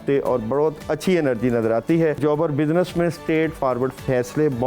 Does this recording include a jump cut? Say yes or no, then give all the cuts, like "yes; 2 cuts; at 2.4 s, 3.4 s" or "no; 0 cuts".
yes; 1 cut; at 2.2 s